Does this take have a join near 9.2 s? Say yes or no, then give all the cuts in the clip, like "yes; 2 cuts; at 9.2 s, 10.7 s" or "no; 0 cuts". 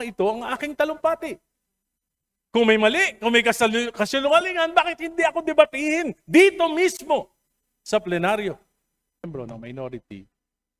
yes; 1 cut; at 9.2 s